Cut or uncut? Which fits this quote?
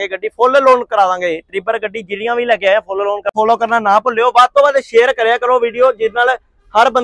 cut